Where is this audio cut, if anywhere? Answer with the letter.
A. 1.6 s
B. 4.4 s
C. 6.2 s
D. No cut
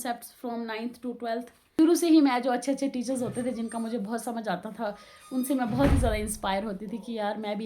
A